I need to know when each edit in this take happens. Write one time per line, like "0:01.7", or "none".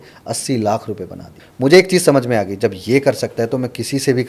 0:01.4